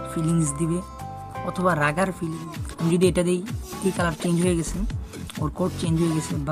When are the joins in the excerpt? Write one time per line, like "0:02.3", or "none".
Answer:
0:02.3

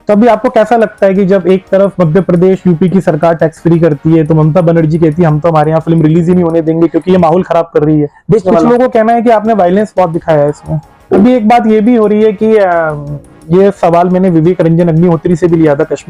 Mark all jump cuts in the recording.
0:08.4
0:11.2

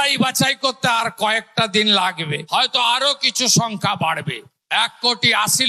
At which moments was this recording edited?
none

